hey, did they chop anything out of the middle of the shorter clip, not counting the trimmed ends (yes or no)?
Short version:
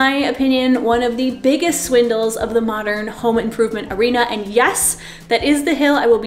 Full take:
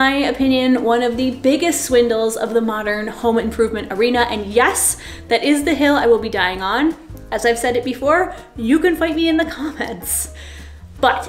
no